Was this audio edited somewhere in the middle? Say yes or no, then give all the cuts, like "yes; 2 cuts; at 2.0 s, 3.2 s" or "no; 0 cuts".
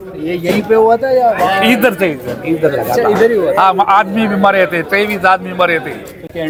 no; 0 cuts